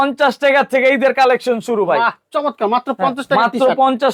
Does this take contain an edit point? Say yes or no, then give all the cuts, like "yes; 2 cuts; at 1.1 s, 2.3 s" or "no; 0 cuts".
no; 0 cuts